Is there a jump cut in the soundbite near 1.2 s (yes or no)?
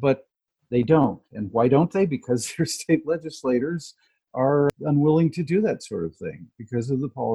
no